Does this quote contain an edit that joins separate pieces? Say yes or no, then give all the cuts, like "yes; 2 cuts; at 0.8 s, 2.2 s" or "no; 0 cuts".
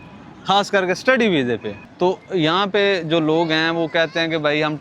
yes; 1 cut; at 1.7 s